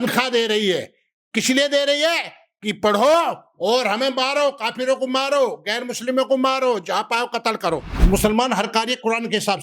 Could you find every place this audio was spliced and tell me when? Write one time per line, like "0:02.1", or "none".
0:07.9